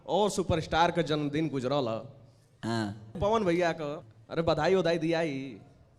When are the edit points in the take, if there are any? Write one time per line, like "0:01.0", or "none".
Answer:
0:03.1
0:04.0